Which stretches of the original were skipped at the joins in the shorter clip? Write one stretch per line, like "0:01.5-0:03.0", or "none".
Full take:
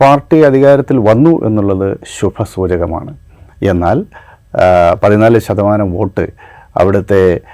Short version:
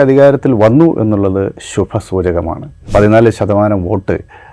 0:03.3-0:05.0